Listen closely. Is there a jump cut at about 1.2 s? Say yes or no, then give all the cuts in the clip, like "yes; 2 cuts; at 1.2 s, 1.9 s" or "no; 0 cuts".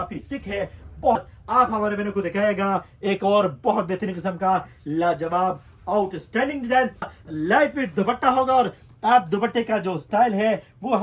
yes; 2 cuts; at 1.2 s, 7.2 s